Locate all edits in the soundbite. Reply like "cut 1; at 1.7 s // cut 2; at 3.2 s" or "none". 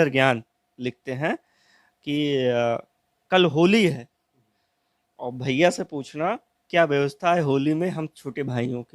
none